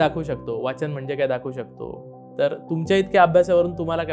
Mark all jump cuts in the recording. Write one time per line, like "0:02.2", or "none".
0:02.1